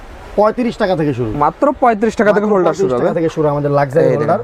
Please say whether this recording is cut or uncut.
uncut